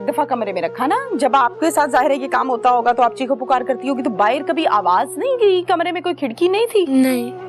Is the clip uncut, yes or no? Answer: yes